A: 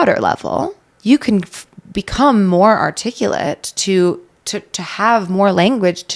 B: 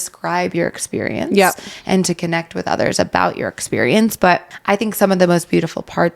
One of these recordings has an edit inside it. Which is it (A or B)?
B